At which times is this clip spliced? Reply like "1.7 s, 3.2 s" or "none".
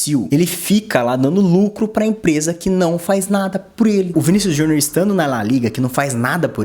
4.1 s

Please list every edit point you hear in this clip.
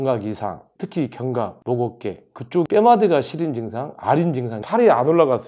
4.5 s

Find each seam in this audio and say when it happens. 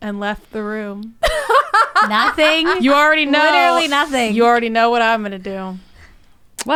none

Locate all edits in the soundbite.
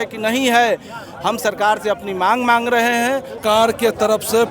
3.4 s

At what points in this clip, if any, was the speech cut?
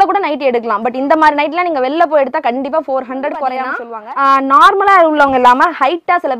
3.9 s

